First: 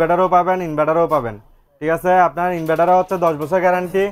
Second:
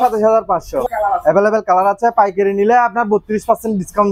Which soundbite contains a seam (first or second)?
second